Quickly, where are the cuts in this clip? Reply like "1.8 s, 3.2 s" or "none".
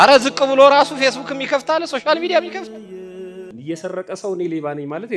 3.6 s